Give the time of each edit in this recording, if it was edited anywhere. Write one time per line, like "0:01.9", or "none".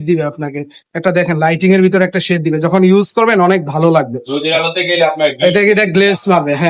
none

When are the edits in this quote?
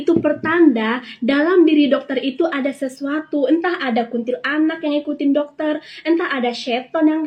none

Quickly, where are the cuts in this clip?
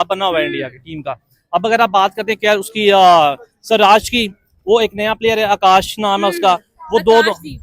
none

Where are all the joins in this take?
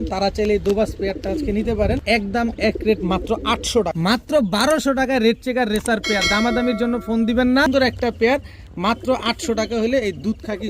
0:02.0
0:03.9
0:07.7

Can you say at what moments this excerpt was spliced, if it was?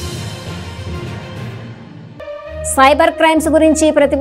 0:02.4

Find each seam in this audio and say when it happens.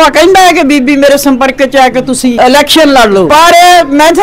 0:02.3
0:03.3

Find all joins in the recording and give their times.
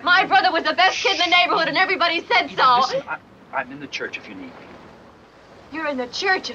0:05.2

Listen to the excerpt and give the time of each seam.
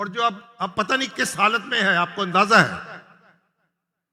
none

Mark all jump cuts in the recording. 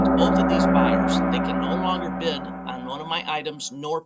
none

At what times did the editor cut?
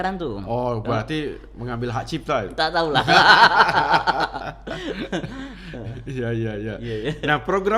none

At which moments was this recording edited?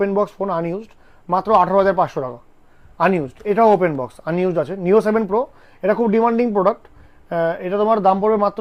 none

